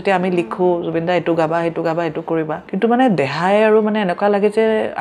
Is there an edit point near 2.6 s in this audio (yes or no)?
yes